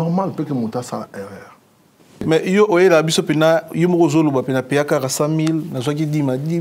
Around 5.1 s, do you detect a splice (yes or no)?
no